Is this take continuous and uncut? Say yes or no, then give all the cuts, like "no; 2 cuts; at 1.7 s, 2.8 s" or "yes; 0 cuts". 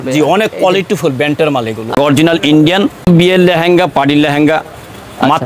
no; 2 cuts; at 2.0 s, 3.1 s